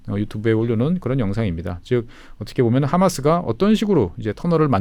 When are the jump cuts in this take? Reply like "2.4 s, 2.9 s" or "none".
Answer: none